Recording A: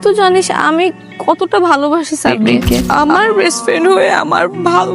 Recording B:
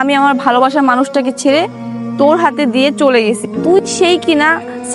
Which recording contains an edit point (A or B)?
A